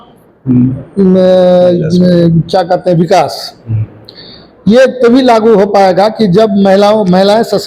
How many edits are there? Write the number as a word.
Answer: zero